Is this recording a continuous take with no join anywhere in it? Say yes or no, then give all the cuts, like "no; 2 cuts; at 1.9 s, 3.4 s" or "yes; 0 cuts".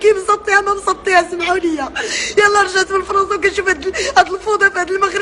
no; 1 cut; at 1.6 s